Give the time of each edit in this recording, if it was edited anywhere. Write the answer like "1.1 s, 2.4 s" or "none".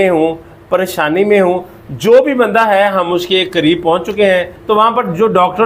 4.5 s